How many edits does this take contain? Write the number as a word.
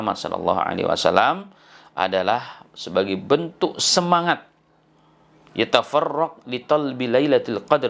zero